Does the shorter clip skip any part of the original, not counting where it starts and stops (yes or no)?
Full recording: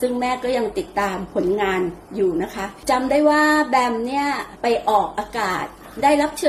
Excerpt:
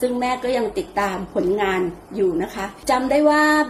no